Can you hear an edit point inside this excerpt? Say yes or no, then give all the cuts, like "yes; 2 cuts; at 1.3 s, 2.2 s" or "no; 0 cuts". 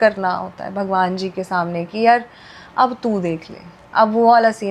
no; 0 cuts